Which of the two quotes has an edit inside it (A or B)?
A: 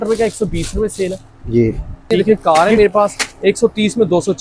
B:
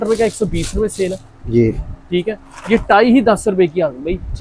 A